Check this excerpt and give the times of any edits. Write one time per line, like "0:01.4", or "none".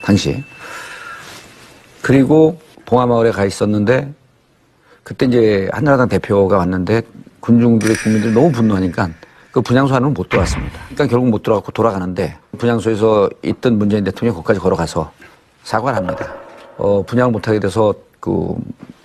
0:07.6